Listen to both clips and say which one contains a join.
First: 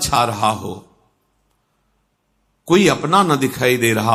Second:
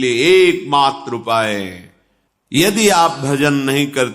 second; 1 cut; at 2.6 s

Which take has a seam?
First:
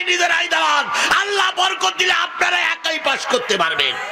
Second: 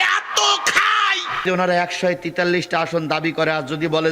second; 1 cut; at 1.4 s

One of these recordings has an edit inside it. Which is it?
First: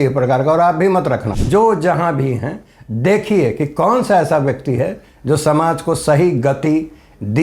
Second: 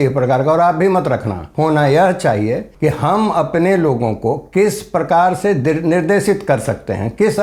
first; 1 cut; at 1.3 s

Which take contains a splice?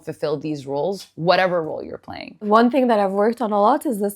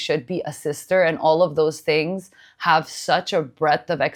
first; 1 cut; at 2.5 s

